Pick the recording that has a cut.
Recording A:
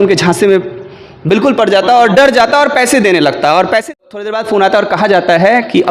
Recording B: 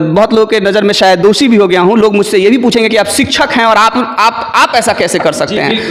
A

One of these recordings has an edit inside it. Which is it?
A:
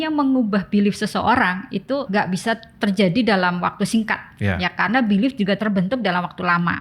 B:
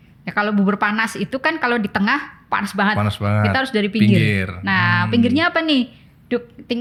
A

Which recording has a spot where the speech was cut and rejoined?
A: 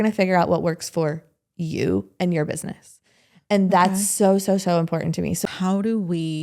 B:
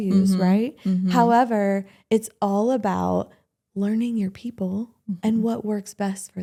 A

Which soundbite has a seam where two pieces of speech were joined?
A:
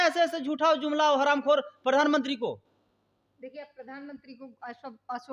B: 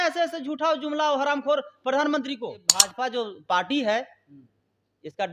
B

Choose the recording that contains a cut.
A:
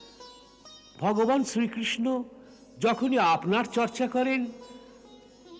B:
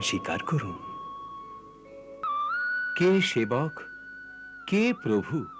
B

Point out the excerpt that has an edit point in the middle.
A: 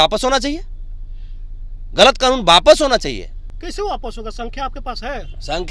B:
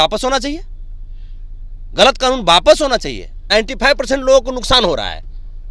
B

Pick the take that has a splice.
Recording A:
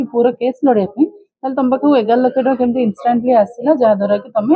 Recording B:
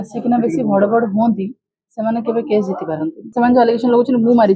B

